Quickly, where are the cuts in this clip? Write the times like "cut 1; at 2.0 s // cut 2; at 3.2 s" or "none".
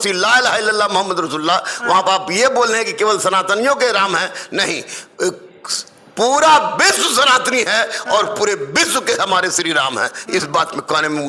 none